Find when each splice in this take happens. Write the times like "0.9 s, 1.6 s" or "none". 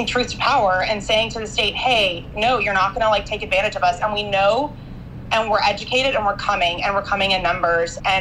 none

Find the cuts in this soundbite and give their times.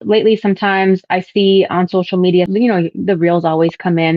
2.5 s

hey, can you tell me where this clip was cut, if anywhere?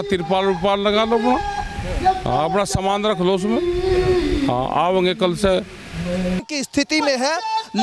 6.4 s

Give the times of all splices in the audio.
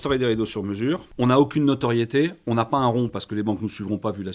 1.1 s

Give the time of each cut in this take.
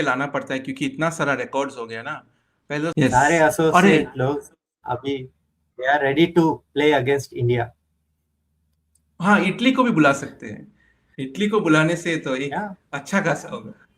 2.9 s

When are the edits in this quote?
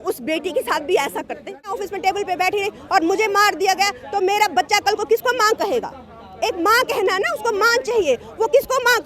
1.7 s

